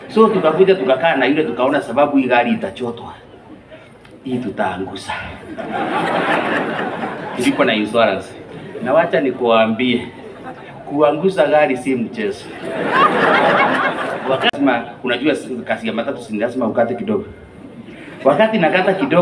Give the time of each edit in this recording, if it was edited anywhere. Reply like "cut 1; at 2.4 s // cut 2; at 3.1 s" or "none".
cut 1; at 14.6 s